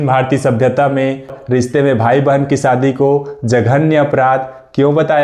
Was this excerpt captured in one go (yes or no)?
no